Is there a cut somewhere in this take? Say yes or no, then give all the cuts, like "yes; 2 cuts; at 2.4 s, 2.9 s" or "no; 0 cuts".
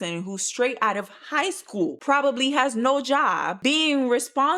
yes; 1 cut; at 3.5 s